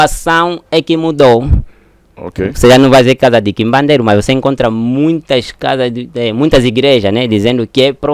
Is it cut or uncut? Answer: uncut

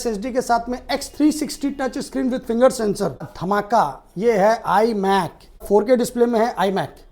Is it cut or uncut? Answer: cut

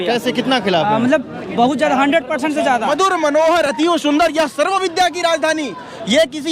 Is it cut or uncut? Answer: cut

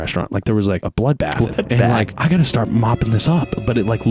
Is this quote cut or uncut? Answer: cut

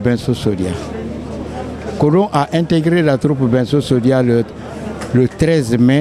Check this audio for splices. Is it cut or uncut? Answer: uncut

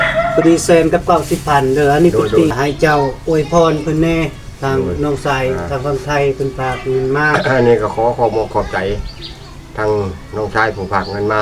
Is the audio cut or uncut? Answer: cut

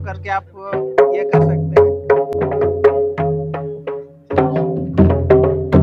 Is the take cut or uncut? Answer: uncut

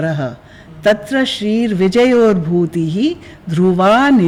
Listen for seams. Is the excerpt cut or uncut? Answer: uncut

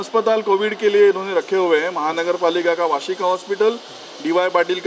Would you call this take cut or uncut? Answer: uncut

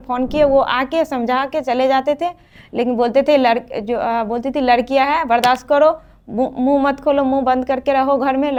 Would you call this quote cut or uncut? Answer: uncut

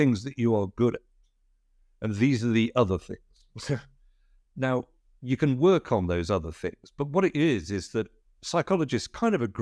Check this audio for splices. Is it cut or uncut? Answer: uncut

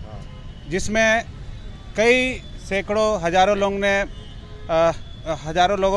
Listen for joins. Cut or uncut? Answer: uncut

